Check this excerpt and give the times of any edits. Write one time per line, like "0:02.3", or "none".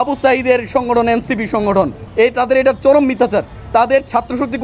0:02.0
0:03.6